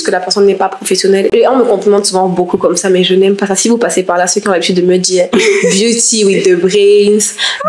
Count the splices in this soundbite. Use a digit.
1